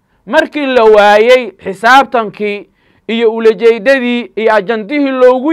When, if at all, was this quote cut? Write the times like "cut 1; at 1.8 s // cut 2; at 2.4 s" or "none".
none